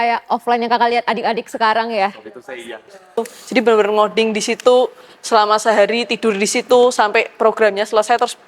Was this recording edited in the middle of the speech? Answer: yes; 1 cut; at 3.2 s

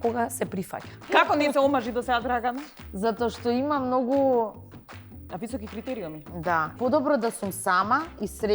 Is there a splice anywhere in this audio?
yes; 2 cuts; at 1.1 s, 6.8 s

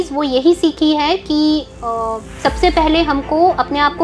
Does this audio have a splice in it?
no; 0 cuts

